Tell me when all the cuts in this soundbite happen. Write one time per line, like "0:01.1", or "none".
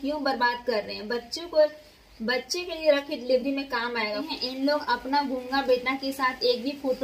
0:04.2